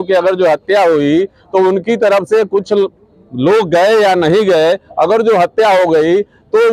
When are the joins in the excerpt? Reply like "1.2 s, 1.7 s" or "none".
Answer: none